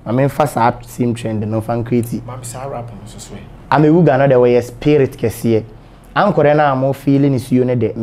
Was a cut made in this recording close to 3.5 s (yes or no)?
yes